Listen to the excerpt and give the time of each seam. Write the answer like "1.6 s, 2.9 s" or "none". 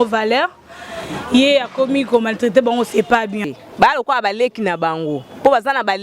3.4 s